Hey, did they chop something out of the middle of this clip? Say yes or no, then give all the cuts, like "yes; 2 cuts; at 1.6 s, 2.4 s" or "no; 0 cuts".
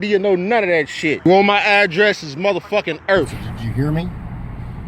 yes; 2 cuts; at 1.2 s, 3.4 s